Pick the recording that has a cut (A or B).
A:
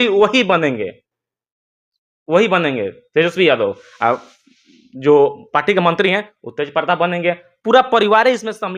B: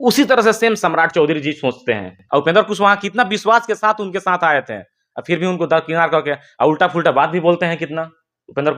B